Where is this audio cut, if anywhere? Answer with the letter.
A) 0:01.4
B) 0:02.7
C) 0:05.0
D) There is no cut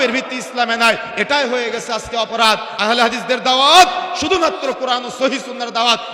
B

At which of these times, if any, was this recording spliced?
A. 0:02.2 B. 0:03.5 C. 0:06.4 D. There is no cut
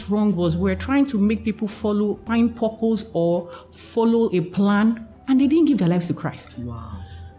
A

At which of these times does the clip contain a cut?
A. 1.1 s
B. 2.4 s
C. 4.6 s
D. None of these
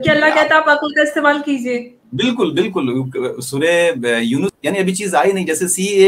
C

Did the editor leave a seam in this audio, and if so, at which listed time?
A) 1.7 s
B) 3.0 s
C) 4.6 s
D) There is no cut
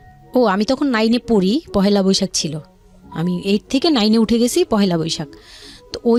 D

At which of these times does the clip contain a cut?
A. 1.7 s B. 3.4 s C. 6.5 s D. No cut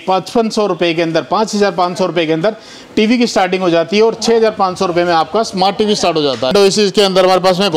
C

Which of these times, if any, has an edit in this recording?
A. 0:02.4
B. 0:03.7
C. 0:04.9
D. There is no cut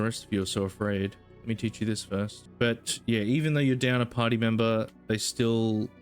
A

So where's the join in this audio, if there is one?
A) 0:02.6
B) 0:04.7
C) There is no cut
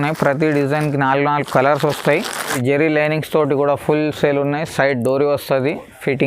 A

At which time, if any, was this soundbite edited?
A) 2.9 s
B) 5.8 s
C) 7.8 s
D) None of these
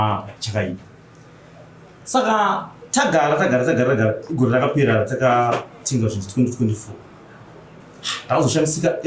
D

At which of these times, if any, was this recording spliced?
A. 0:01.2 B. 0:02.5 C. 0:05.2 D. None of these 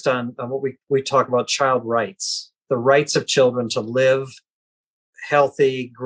C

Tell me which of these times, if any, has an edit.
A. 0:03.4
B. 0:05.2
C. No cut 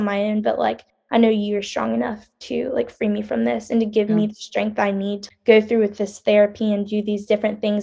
B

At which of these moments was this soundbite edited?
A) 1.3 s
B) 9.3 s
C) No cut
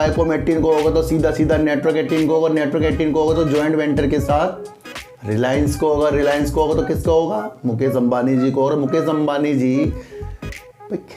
C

